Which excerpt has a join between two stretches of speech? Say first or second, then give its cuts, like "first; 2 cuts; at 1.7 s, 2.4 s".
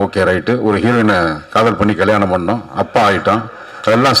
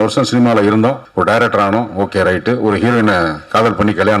second; 1 cut; at 1.0 s